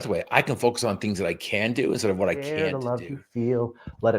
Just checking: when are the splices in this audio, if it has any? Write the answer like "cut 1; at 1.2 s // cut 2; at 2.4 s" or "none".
cut 1; at 2.7 s